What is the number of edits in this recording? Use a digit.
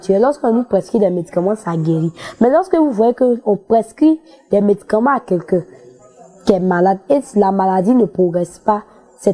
0